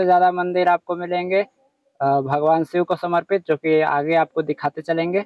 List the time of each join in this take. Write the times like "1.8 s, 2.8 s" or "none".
none